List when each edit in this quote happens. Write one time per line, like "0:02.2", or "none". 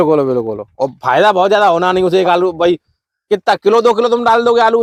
none